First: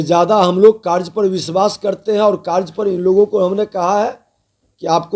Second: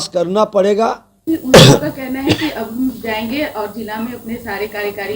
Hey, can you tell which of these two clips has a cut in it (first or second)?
second